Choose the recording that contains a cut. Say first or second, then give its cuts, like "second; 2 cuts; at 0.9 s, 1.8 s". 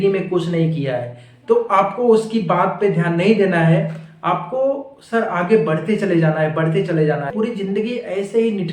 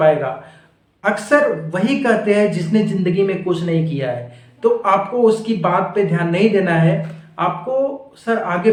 first; 1 cut; at 7.3 s